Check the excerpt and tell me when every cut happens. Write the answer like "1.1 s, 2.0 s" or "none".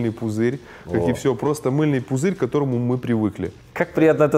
none